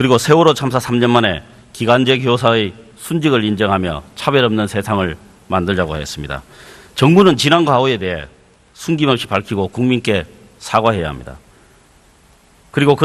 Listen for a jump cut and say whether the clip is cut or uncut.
cut